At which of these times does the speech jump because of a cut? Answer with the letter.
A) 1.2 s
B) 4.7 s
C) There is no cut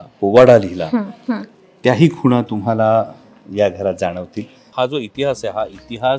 B